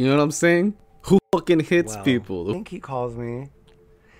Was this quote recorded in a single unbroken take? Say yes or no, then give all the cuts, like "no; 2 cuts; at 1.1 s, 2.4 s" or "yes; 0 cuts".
no; 2 cuts; at 0.9 s, 2.5 s